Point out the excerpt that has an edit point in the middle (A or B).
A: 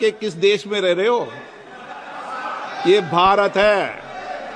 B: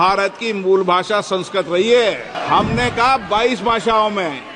B